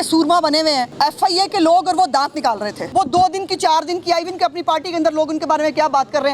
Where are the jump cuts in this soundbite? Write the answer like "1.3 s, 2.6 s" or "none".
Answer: 0.9 s, 2.8 s